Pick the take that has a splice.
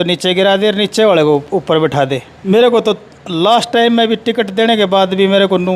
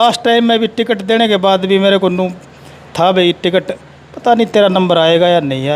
first; 1 cut; at 2.3 s

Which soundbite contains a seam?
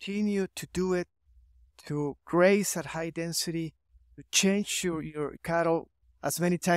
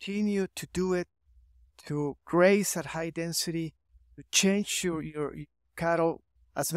first; 1 cut; at 5.4 s

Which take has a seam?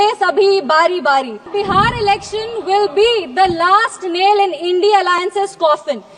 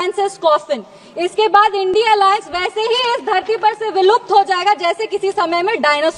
first; 1 cut; at 1.5 s

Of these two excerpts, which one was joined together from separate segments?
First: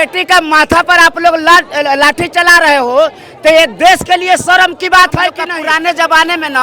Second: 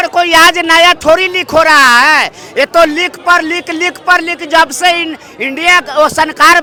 first; 1 cut; at 5.5 s

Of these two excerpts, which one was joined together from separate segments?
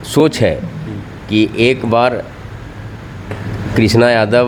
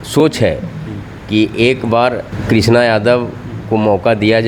second; 1 cut; at 2.3 s

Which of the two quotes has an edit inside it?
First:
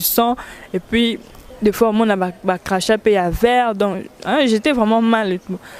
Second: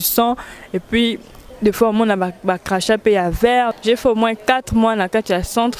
second; 1 cut; at 3.7 s

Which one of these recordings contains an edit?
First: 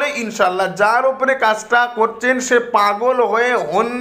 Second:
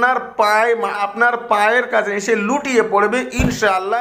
second; 1 cut; at 1.0 s

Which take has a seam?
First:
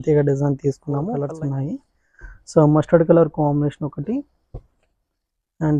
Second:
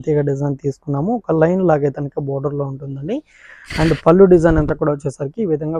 first; 1 cut; at 1.1 s

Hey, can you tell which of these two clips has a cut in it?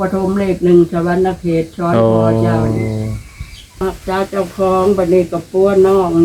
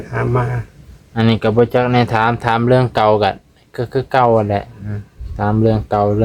first; 1 cut; at 3.8 s

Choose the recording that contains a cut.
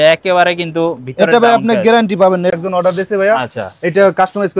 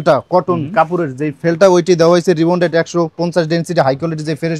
first; 1 cut; at 2.5 s

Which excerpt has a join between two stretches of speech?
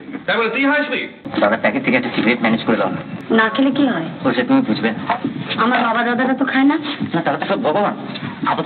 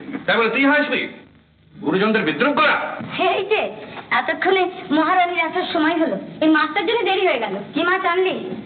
first; 2 cuts; at 1.2 s, 3.1 s

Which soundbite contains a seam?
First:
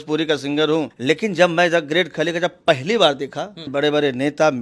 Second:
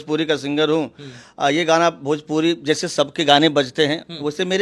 first; 2 cuts; at 0.9 s, 3.7 s

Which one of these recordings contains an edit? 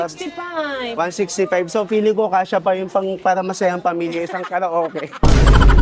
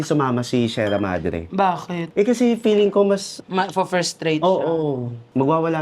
second; 1 cut; at 3.4 s

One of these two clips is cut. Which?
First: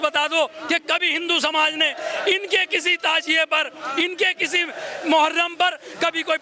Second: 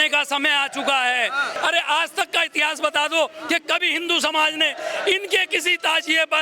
second; 1 cut; at 1.6 s

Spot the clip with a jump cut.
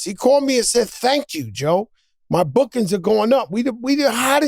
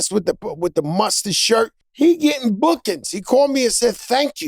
second; 1 cut; at 1.8 s

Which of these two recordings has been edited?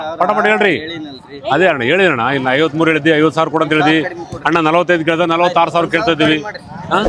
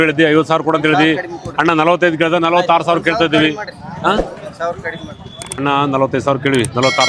second; 1 cut; at 5.6 s

